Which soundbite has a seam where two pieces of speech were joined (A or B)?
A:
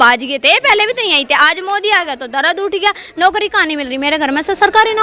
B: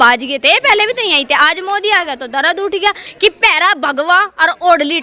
B